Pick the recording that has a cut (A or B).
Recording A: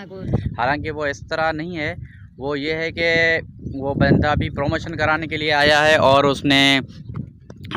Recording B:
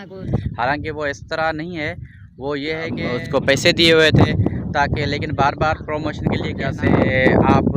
B